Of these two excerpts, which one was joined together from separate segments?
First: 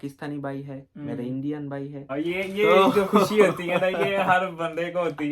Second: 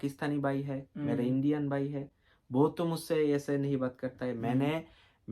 first; 1 cut; at 2.1 s

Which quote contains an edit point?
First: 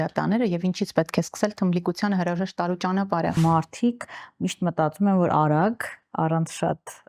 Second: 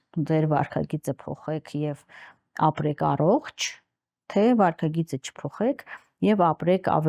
first; 1 cut; at 3.4 s

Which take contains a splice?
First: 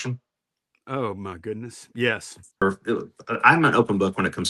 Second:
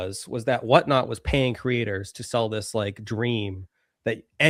first; 1 cut; at 2.6 s

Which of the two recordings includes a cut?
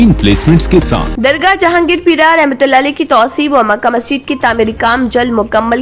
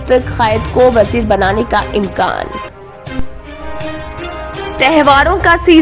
first; 1 cut; at 1.1 s

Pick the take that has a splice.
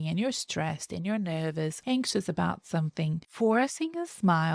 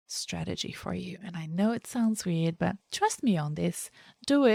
first; 2 cuts; at 1.8 s, 3.2 s

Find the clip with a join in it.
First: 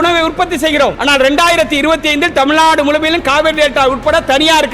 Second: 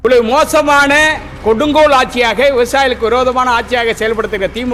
first; 1 cut; at 1.0 s

